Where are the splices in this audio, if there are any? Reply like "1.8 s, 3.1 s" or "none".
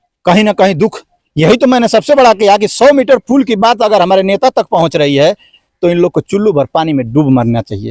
none